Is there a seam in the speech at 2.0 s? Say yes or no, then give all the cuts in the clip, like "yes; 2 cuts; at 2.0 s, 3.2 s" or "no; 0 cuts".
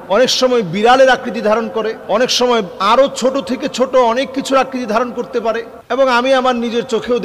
no; 1 cut; at 5.7 s